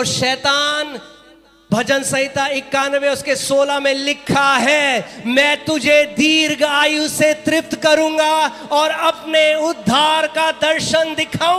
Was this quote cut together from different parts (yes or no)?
no